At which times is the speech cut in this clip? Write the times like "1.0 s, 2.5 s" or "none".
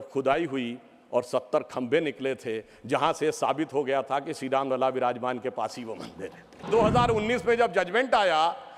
6.6 s

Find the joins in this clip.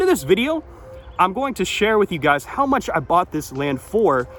none

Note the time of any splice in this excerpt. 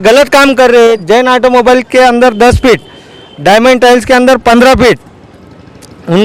1.0 s

